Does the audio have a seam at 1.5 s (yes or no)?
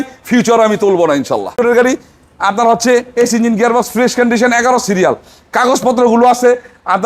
yes